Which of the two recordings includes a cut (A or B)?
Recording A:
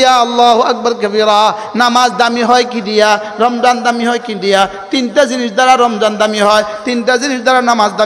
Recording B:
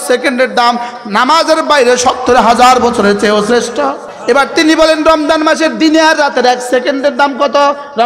B